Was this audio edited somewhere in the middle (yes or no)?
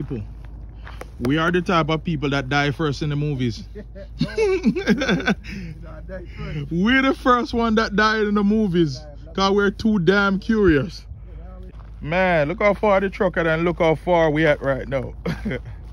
no